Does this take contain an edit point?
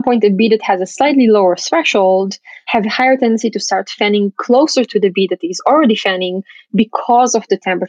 no; 0 cuts

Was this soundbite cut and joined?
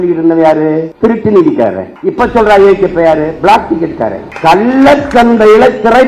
yes; 3 cuts; at 0.9 s, 1.9 s, 4.3 s

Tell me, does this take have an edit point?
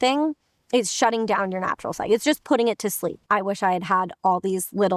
yes; 1 cut; at 3.2 s

